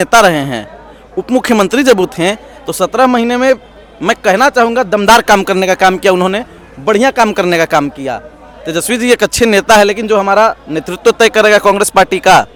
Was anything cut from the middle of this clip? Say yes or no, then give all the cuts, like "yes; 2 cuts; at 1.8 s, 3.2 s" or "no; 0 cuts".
no; 0 cuts